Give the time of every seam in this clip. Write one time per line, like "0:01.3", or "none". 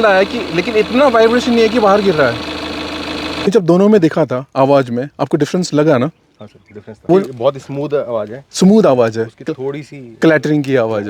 0:03.5
0:07.0